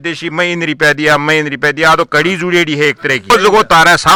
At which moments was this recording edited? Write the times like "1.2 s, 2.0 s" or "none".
none